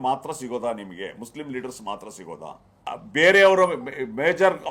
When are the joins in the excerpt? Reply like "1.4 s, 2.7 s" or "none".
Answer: 2.7 s